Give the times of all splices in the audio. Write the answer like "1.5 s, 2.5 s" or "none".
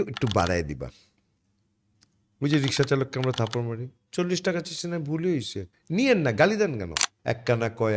7.1 s